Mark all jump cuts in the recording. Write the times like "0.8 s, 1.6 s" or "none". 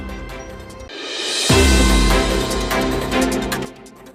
none